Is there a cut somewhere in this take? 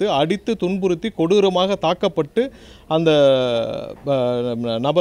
no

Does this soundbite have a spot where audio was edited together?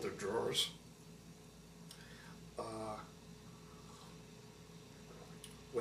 yes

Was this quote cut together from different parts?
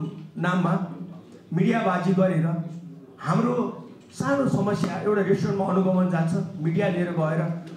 no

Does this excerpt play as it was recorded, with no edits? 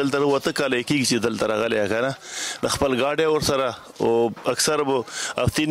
yes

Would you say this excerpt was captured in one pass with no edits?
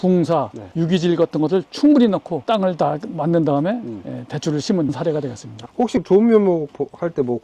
no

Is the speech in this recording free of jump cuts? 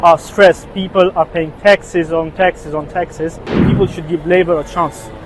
no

